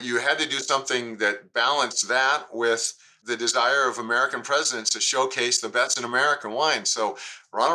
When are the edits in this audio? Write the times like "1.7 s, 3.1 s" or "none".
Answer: 6.4 s